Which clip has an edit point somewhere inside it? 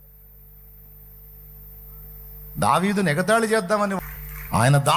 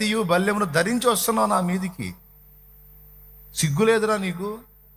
first; 1 cut; at 4.0 s

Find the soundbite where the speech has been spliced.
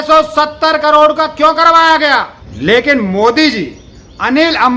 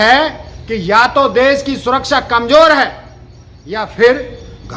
first; 1 cut; at 2.4 s

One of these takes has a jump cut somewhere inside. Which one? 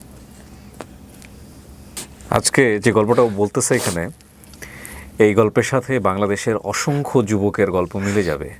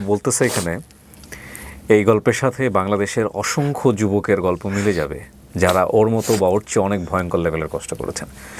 first; 1 cut; at 2.0 s

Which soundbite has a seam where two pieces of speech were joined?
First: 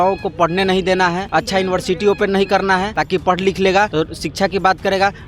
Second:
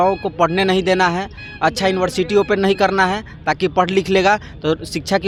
first; 3 cuts; at 1.2 s, 2.9 s, 3.9 s

